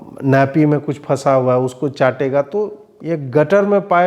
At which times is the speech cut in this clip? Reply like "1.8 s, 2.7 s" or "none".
2.9 s